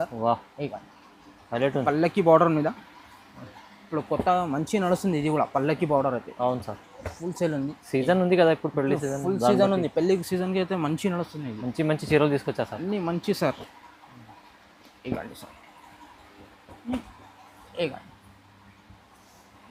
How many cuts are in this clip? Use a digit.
0